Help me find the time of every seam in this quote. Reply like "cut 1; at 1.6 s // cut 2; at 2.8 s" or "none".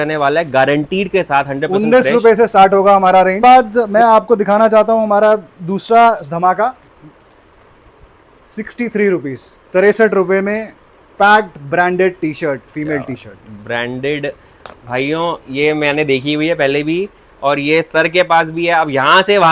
cut 1; at 3.4 s